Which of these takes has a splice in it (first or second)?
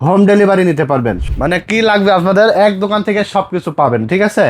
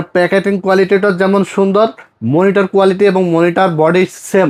first